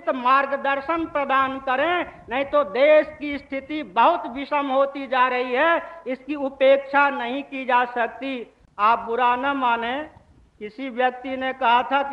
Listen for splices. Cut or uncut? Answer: uncut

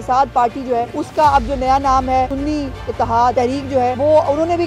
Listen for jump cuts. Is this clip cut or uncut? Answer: cut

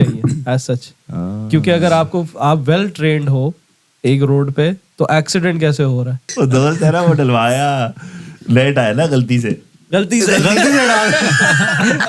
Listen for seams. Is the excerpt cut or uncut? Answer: cut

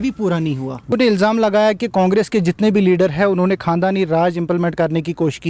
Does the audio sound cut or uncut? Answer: cut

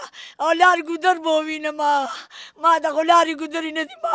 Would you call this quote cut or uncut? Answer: uncut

